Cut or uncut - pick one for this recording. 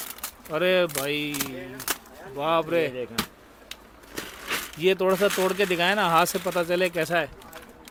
uncut